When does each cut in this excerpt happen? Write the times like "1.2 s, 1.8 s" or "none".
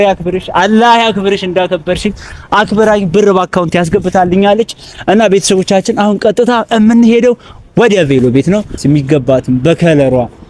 8.8 s